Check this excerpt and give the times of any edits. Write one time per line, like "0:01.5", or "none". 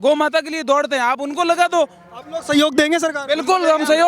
none